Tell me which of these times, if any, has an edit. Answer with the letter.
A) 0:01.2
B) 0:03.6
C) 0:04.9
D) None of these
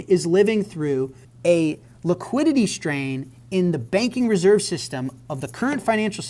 A